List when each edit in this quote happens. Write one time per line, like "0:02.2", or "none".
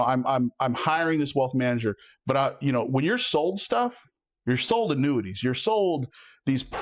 none